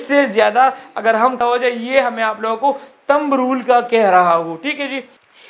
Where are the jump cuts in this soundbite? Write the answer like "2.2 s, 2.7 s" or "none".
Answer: 1.4 s